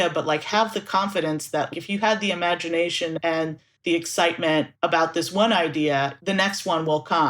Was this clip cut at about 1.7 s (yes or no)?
yes